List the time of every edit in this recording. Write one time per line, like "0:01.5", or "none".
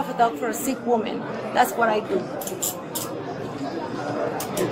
none